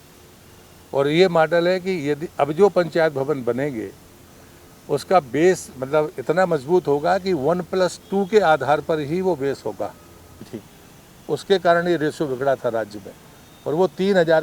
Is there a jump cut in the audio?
yes; 1 cut; at 10.8 s

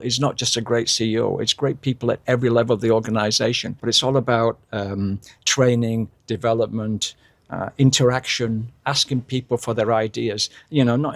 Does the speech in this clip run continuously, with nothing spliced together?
no; 1 cut; at 3.7 s

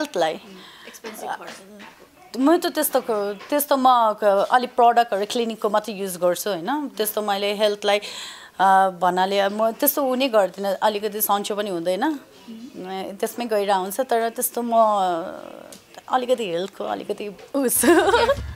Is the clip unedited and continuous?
yes; 0 cuts

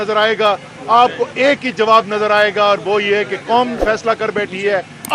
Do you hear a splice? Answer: no; 0 cuts

